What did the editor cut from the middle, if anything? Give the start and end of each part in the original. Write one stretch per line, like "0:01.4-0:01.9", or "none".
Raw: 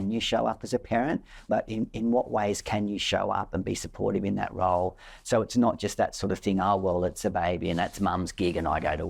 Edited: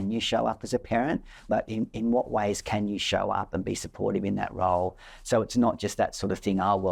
none